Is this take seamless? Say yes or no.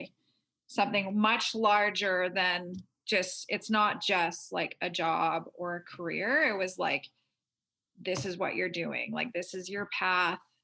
yes